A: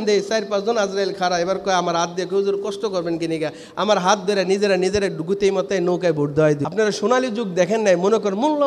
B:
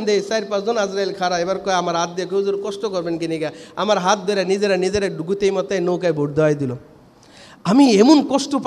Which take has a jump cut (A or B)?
A